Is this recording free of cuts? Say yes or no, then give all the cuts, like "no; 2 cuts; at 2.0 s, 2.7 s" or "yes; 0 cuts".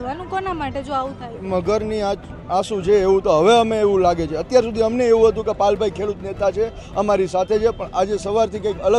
yes; 0 cuts